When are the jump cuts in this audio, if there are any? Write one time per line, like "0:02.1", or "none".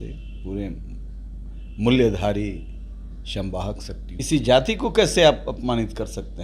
0:04.1